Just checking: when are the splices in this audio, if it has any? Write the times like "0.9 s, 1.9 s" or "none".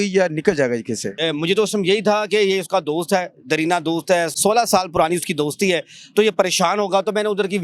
1.1 s